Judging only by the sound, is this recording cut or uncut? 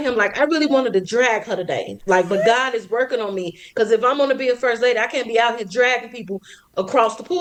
uncut